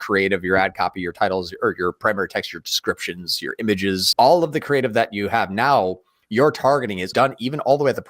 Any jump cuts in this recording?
yes; 2 cuts; at 4.1 s, 7.1 s

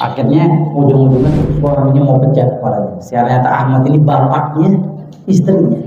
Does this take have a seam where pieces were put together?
yes; 1 cut; at 1.4 s

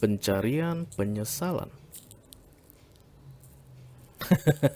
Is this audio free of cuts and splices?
yes; 0 cuts

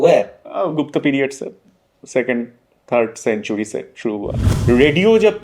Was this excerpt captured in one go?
no; 1 cut; at 4.5 s

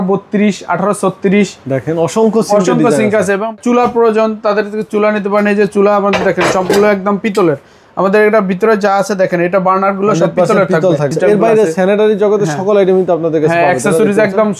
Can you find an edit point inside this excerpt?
yes; 2 cuts; at 3.5 s, 11.1 s

